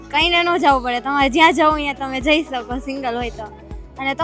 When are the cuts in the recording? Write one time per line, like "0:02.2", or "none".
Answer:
none